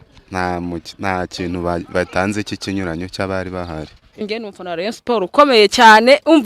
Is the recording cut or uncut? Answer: cut